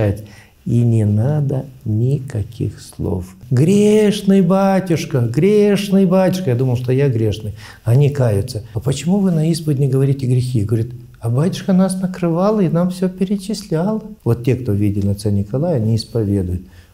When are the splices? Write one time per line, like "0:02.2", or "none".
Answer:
0:03.4
0:08.6
0:14.1

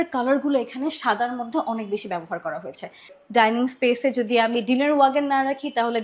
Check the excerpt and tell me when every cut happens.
0:03.1

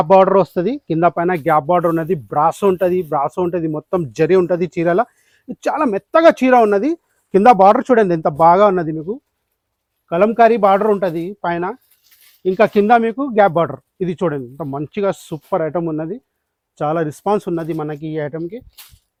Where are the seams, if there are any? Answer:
none

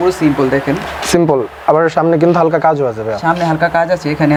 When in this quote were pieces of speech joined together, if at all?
none

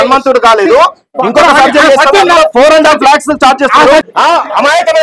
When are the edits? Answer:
0:04.0

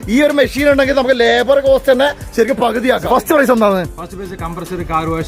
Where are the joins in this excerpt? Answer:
0:03.0

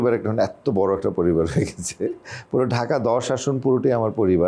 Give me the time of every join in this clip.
none

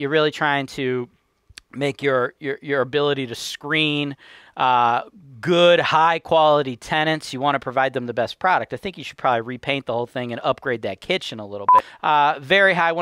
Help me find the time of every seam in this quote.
0:11.8

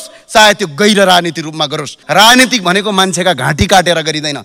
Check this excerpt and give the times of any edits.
0:01.9

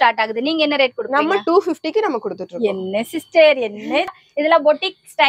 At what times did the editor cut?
0:04.1

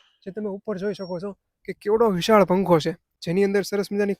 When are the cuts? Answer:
0:03.1

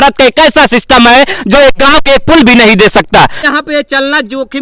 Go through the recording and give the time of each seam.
0:03.5

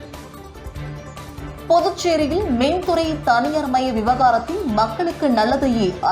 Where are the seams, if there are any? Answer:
0:01.2

